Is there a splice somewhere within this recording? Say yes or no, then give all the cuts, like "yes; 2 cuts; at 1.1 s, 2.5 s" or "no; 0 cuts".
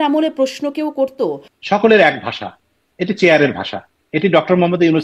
yes; 1 cut; at 1.5 s